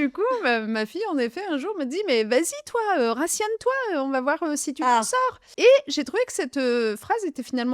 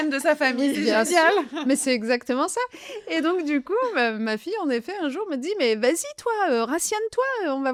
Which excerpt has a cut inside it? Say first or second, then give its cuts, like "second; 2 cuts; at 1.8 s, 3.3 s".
first; 1 cut; at 5.4 s